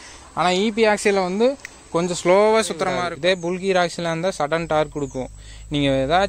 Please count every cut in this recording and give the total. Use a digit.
1